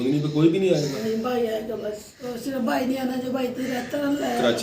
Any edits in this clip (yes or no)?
yes